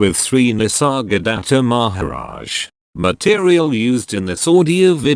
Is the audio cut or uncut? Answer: cut